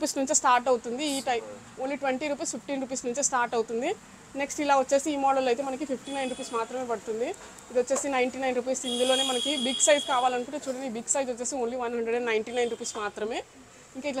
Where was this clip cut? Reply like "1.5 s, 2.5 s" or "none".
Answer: none